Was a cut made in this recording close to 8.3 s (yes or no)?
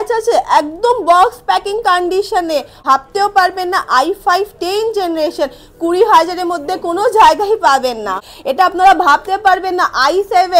yes